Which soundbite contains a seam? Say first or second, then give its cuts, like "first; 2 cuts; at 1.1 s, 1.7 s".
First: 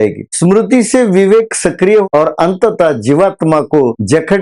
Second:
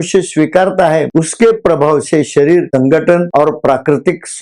first; 1 cut; at 2.1 s